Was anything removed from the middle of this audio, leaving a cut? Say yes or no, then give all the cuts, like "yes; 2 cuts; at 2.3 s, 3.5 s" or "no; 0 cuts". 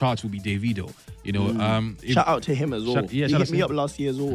no; 0 cuts